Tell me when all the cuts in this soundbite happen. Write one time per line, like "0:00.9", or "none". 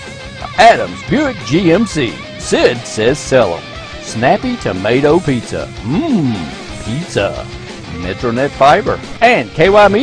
0:09.1